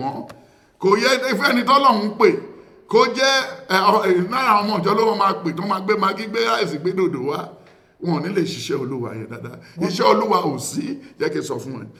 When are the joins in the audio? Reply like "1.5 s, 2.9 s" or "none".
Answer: none